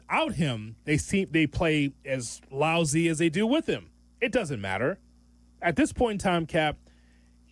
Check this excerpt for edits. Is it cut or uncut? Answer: uncut